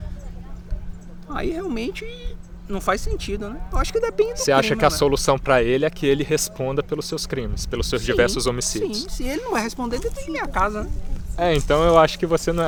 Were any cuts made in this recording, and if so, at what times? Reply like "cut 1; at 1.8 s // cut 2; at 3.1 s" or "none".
none